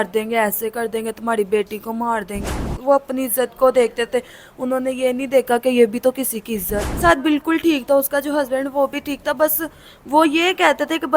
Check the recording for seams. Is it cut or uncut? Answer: cut